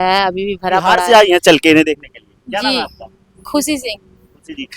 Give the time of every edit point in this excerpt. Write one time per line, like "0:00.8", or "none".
0:01.0